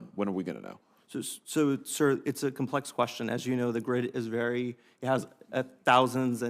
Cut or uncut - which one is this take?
uncut